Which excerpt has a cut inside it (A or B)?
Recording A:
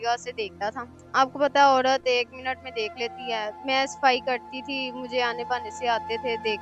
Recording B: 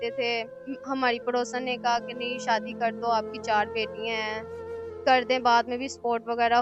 A